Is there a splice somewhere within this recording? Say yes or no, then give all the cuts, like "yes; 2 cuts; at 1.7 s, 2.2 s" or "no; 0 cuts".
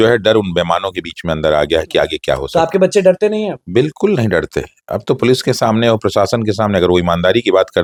no; 0 cuts